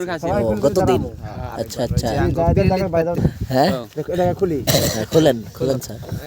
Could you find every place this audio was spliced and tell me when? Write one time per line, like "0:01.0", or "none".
0:03.2